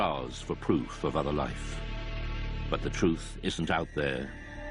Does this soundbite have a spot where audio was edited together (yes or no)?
no